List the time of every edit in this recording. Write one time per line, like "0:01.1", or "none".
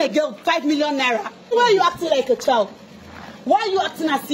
0:01.5